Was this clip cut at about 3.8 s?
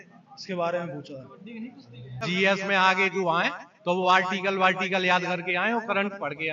no; 1 cut; at 2.2 s

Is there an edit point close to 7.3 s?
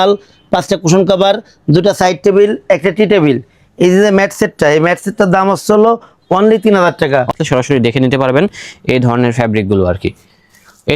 yes; 1 cut; at 7.3 s

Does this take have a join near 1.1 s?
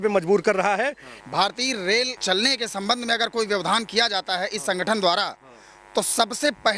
yes; 2 cuts; at 1.1 s, 2.2 s

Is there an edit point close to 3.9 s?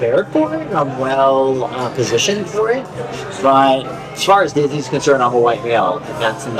yes; 1 cut; at 3.9 s

